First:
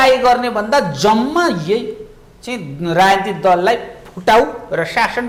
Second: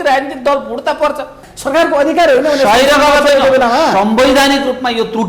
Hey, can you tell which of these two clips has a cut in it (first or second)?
second